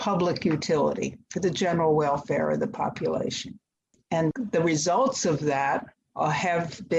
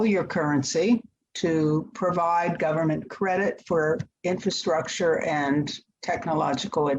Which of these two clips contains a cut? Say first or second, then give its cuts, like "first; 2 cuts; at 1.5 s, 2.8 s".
second; 1 cut; at 1.2 s